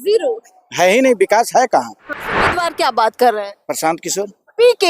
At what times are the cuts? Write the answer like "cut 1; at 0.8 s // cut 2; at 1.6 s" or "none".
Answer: cut 1; at 2.5 s